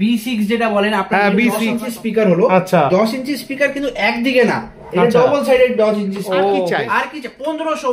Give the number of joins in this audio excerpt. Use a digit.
2